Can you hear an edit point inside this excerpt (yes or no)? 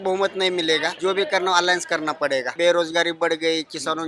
yes